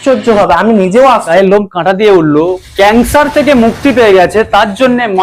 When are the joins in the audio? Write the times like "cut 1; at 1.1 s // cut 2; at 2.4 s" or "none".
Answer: cut 1; at 1.3 s